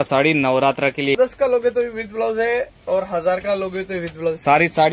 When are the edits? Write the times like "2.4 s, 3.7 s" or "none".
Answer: 1.2 s